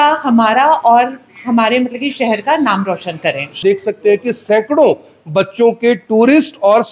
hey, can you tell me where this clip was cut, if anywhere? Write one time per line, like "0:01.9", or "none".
0:03.6